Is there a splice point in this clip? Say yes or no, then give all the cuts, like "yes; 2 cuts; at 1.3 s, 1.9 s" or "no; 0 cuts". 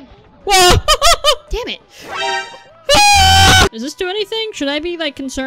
yes; 1 cut; at 3.7 s